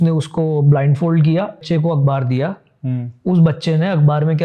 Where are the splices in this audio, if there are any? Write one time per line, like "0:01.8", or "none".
0:01.6